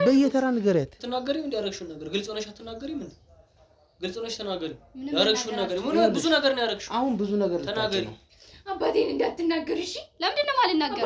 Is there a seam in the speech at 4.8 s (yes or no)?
no